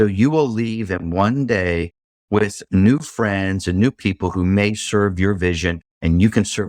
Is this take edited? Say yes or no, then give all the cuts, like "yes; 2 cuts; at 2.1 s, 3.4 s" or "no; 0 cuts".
no; 0 cuts